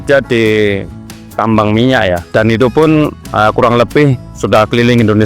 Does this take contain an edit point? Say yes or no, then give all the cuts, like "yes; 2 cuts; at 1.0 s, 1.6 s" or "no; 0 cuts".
yes; 1 cut; at 3.5 s